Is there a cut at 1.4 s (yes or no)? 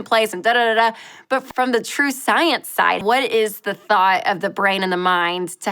yes